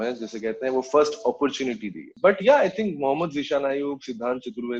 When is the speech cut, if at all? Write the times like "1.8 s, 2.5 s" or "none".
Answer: none